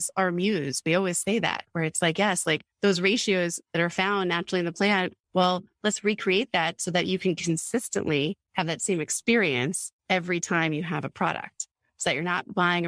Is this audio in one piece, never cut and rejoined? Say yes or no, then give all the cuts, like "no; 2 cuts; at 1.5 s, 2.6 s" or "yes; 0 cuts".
yes; 0 cuts